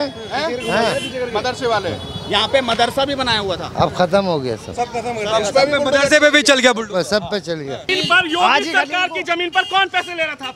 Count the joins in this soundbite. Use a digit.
1